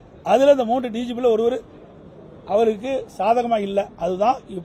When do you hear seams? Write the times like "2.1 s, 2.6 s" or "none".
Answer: none